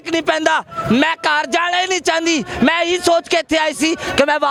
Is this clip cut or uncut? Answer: uncut